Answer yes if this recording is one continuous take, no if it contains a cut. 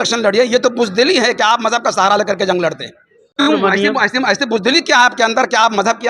no